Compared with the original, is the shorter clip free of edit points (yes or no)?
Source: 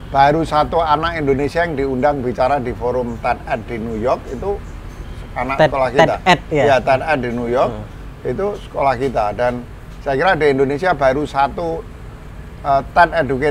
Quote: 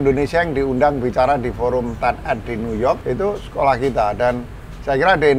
no